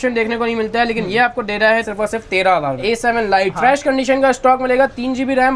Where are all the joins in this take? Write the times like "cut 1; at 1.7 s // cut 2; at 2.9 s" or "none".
cut 1; at 1.9 s // cut 2; at 2.8 s